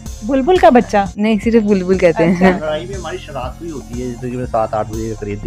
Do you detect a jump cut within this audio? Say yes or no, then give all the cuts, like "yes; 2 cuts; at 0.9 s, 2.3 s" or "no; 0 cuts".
yes; 1 cut; at 2.5 s